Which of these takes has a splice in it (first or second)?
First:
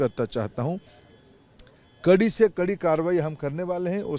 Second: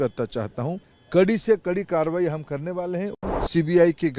second